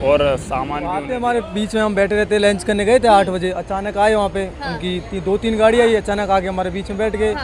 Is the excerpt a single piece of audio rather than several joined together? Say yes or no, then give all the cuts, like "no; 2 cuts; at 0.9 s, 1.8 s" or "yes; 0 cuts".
no; 1 cut; at 1.0 s